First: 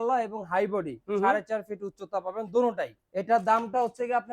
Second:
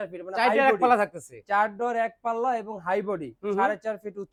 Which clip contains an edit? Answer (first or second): first